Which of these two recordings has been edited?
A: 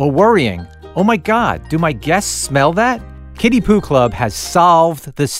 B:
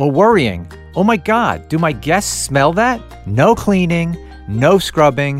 B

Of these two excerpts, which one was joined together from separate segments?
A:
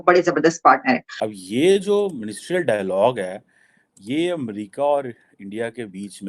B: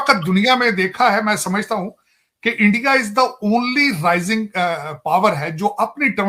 A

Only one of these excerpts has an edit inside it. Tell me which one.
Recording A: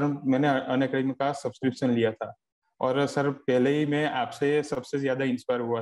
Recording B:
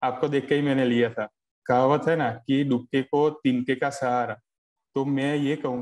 B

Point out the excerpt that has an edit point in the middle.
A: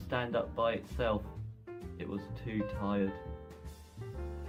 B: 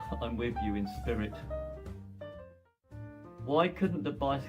B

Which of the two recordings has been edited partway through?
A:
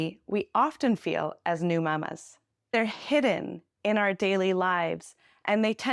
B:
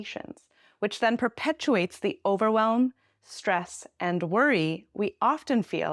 A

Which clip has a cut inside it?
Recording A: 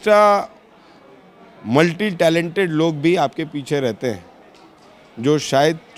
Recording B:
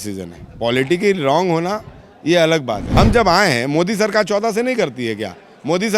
B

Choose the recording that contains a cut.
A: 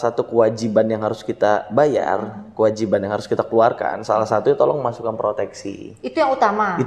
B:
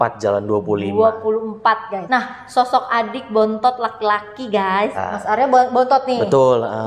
B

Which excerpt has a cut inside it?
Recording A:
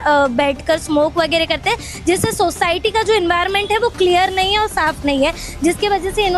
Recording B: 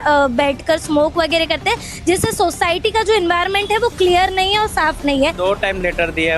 B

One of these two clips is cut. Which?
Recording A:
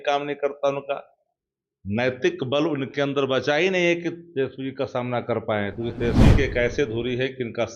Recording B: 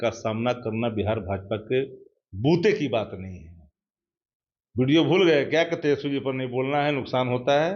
A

